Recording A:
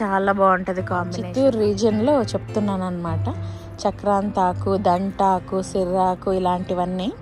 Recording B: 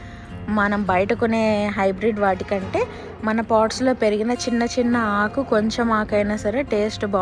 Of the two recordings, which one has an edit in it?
A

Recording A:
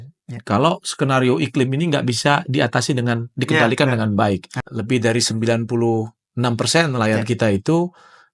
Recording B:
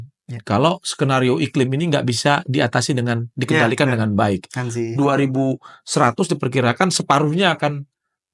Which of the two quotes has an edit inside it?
A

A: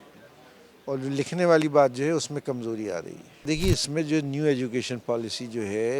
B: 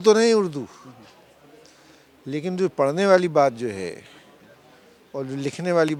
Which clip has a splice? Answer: A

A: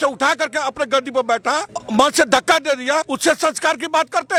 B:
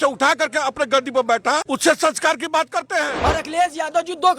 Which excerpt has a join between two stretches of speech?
B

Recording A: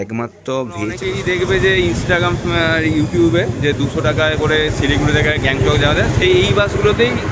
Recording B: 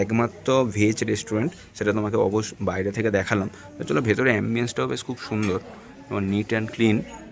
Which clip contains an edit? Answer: A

